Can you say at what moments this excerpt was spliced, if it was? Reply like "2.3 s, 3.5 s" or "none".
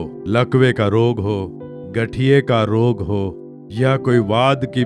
none